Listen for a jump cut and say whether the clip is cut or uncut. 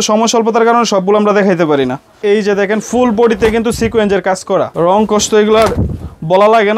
cut